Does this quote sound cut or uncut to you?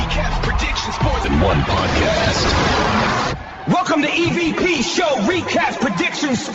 cut